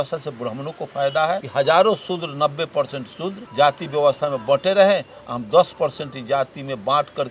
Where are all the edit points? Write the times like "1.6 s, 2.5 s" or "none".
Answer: 1.5 s, 3.4 s